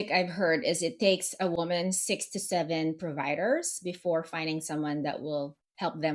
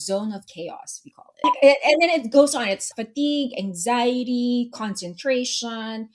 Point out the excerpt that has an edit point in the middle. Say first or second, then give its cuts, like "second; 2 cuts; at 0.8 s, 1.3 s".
second; 2 cuts; at 1.5 s, 2.9 s